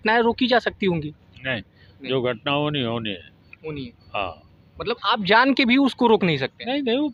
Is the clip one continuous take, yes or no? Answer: yes